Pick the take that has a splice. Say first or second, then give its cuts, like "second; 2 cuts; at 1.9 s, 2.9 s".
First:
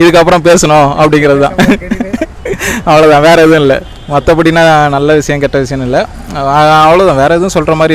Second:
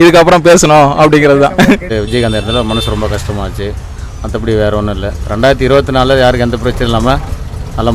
second; 1 cut; at 1.9 s